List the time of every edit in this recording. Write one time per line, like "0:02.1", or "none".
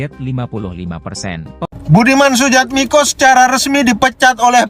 0:01.7

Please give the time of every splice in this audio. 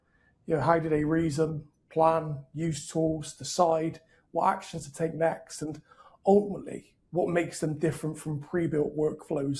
none

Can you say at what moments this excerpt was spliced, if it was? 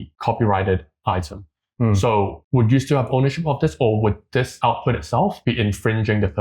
0:04.5
0:05.4

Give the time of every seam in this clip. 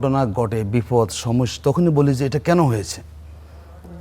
none

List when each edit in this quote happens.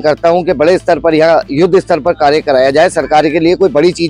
none

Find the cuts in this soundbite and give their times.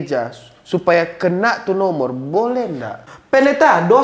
0:03.1

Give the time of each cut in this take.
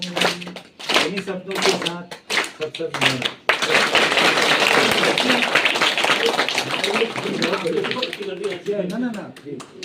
0:03.7

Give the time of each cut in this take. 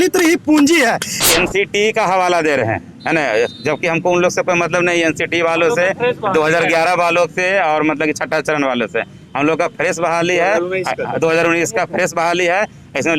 0:01.1

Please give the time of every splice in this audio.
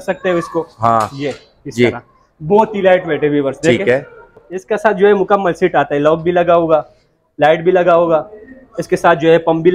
0:04.5

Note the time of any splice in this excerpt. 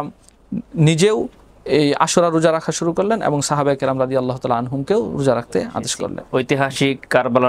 0:06.1

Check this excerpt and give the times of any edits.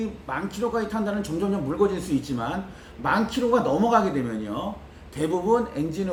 none

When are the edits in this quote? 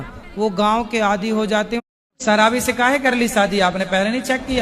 0:01.9

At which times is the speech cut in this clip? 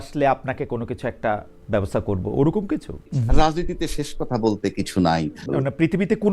0:03.1
0:05.5

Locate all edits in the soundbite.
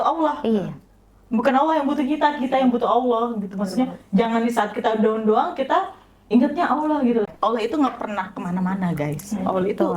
0:07.3

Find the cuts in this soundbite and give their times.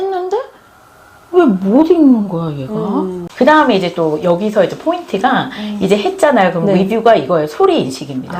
0:03.2

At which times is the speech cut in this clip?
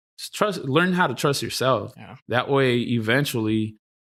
none

